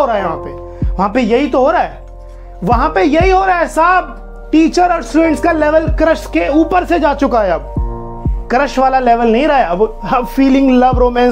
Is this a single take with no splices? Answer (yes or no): yes